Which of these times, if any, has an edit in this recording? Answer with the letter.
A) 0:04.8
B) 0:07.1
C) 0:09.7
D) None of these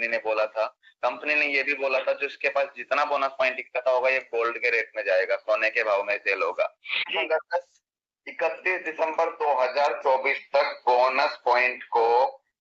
B